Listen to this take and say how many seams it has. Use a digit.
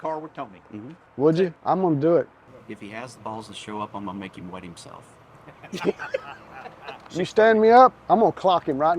3